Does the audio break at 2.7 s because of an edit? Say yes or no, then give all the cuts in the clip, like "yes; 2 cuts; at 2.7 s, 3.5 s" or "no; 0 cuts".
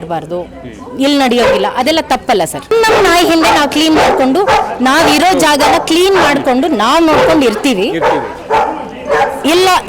yes; 1 cut; at 2.7 s